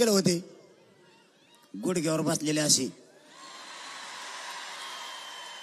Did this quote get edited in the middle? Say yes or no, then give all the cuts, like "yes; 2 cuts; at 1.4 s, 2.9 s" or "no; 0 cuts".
no; 0 cuts